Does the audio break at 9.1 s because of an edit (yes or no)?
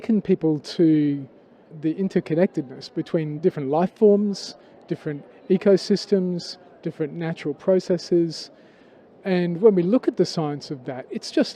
no